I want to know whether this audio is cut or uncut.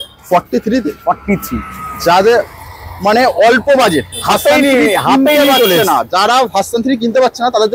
uncut